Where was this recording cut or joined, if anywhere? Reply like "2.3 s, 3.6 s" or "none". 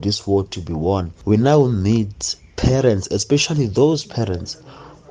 1.1 s